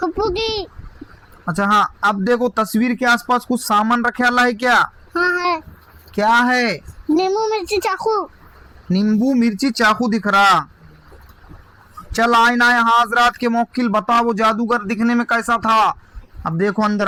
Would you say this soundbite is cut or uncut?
uncut